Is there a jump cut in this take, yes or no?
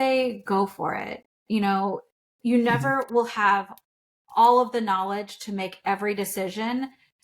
no